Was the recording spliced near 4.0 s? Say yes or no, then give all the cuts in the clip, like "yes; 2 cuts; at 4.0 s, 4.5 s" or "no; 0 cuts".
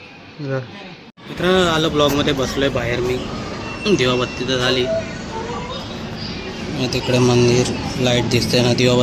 no; 1 cut; at 1.0 s